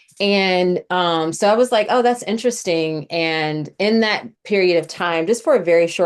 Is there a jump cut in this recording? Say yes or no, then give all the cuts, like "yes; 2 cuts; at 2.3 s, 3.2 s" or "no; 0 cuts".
no; 0 cuts